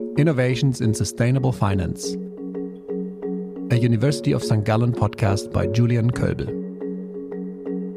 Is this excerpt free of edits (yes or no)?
yes